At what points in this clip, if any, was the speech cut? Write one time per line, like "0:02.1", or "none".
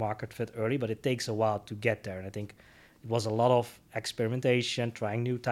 none